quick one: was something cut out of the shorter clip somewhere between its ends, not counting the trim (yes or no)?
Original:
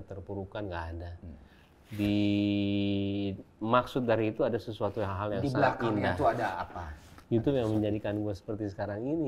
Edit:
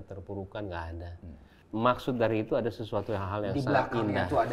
yes